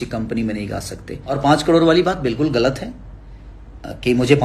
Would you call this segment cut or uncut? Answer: cut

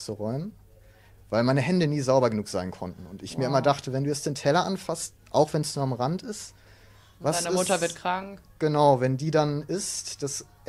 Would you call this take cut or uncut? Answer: uncut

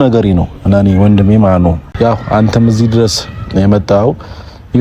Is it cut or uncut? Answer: cut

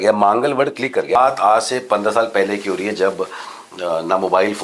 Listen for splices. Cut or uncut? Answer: cut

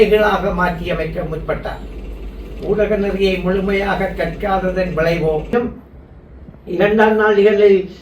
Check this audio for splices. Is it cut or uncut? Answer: cut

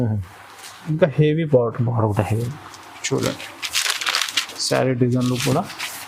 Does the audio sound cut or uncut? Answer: uncut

